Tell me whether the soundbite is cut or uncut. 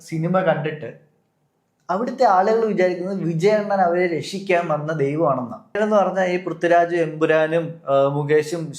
cut